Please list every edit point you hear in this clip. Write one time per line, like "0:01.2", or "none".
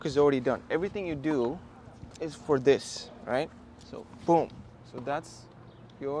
none